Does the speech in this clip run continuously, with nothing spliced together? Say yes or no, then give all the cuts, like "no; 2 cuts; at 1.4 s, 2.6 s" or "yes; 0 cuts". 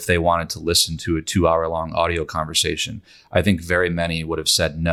yes; 0 cuts